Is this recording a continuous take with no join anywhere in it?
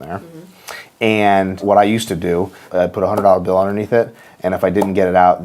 no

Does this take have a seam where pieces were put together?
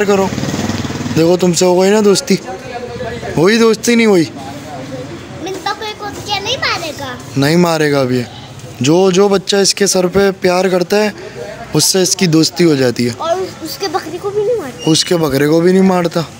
no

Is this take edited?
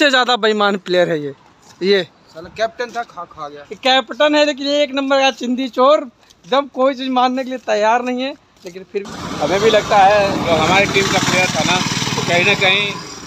yes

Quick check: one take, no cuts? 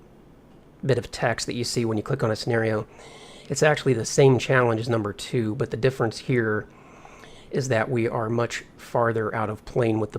no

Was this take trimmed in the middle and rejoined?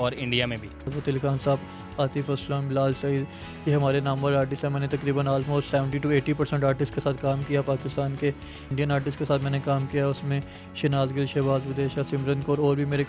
yes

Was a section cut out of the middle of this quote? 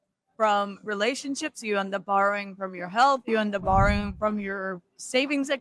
no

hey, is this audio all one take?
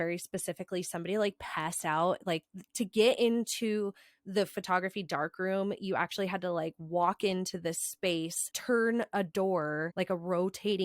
no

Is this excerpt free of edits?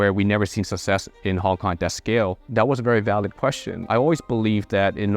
no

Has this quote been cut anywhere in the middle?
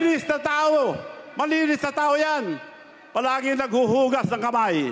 no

